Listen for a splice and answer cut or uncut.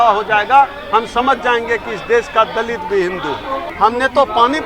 cut